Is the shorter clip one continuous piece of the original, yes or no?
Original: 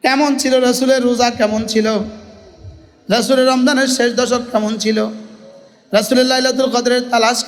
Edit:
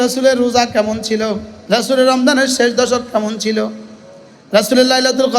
no